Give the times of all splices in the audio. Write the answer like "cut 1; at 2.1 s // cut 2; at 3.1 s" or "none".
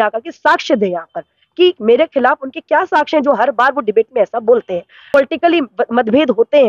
cut 1; at 5.1 s